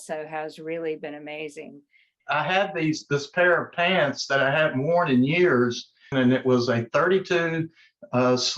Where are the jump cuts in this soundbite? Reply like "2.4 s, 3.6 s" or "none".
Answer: 2.1 s, 6.0 s